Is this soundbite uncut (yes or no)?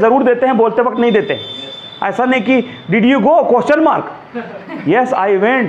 yes